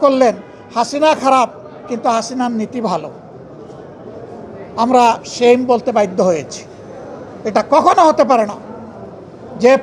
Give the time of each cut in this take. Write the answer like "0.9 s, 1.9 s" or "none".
none